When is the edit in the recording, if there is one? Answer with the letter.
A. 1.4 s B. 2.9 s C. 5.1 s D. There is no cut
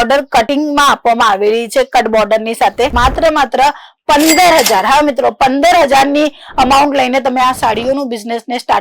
B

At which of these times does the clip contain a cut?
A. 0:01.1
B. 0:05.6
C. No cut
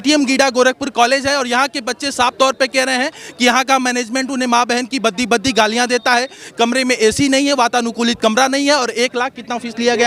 C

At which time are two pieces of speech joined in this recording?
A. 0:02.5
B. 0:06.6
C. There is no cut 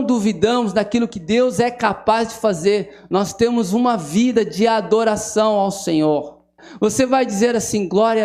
B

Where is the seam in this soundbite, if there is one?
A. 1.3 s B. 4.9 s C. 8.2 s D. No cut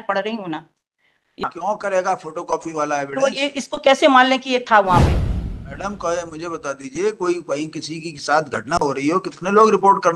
A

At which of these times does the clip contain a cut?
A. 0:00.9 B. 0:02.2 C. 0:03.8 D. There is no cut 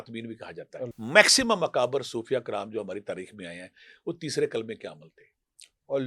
A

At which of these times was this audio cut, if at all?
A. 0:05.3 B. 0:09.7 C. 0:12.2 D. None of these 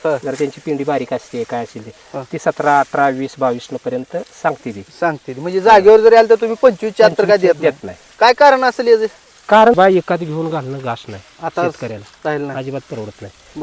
B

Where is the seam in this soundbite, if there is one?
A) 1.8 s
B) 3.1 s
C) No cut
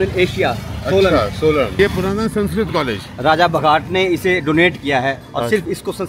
A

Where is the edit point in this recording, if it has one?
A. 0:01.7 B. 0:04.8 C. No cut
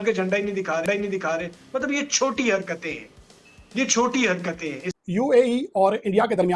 B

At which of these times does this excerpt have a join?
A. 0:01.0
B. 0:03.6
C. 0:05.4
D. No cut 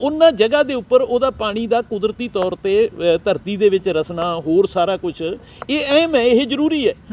D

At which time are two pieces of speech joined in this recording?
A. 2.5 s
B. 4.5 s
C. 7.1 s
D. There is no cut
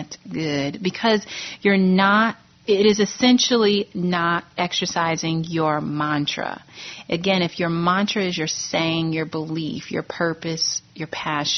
A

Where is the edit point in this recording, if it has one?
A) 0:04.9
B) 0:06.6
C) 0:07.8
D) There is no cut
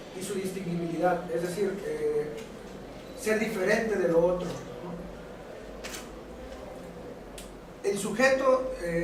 D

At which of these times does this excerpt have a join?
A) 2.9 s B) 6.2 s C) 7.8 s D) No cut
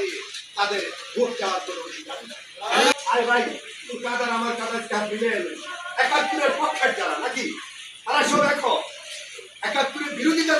A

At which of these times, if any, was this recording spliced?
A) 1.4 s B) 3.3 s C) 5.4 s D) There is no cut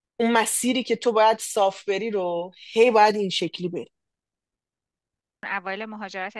C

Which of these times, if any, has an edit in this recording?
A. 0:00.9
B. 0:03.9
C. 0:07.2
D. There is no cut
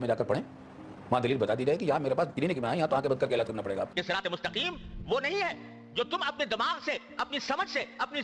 B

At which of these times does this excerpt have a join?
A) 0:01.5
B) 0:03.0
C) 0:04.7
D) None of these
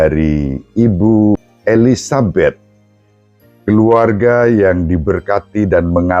A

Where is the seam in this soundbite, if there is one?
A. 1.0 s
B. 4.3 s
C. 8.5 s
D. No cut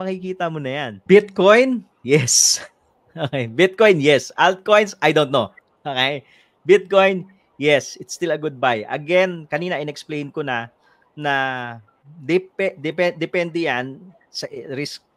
A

